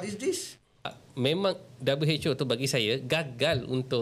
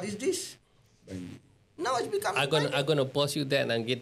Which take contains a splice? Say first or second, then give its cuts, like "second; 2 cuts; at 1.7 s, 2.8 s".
first; 1 cut; at 1.0 s